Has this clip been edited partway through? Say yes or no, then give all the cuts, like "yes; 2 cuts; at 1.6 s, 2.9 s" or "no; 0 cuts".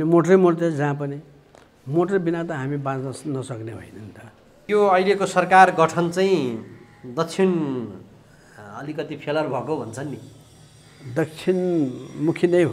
yes; 1 cut; at 4.6 s